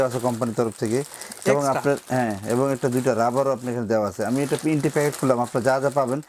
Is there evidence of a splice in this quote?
no; 0 cuts

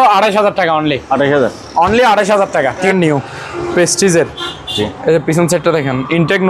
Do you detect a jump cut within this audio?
yes; 1 cut; at 2.9 s

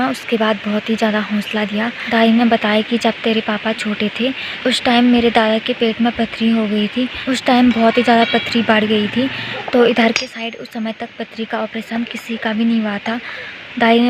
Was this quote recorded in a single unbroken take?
yes; 0 cuts

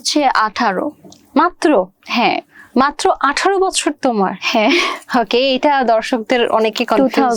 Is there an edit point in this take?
no; 0 cuts

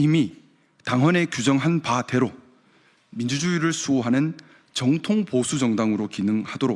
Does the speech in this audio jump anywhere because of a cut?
no; 0 cuts

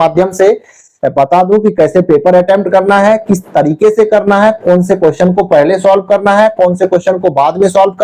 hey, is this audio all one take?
yes; 0 cuts

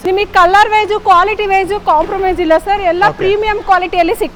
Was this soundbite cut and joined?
no; 0 cuts

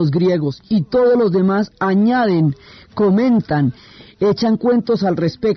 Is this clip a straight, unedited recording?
yes; 0 cuts

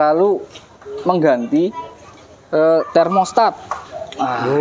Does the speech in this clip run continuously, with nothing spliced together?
yes; 0 cuts

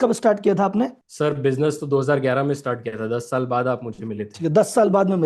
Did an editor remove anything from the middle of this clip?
no; 0 cuts

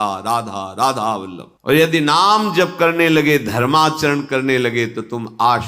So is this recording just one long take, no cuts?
no; 1 cut; at 1.5 s

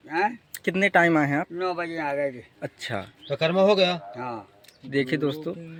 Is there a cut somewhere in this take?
no; 0 cuts

